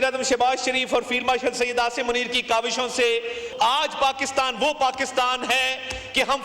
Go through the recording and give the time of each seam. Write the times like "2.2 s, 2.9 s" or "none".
3.5 s